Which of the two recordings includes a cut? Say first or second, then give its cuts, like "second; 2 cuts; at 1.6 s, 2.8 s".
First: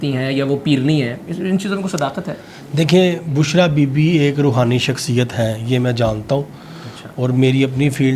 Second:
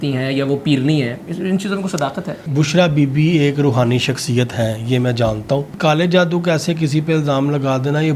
second; 2 cuts; at 2.4 s, 5.8 s